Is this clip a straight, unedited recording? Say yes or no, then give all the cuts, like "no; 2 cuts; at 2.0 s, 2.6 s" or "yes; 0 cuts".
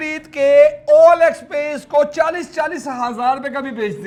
yes; 0 cuts